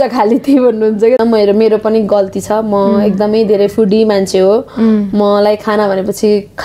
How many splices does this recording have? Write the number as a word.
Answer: one